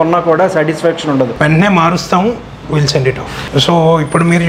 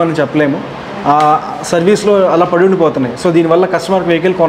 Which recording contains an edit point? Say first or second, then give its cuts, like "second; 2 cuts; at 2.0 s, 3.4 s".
first; 2 cuts; at 1.3 s, 3.4 s